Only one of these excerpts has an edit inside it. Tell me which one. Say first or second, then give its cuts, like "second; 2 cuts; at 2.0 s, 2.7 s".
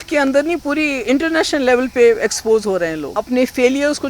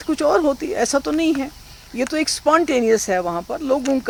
first; 1 cut; at 3.2 s